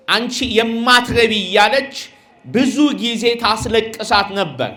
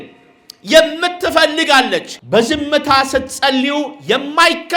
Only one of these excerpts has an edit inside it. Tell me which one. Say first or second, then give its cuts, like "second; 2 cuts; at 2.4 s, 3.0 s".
second; 1 cut; at 2.1 s